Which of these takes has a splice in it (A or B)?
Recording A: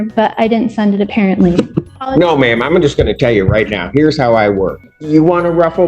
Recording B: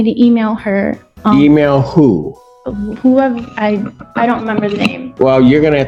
A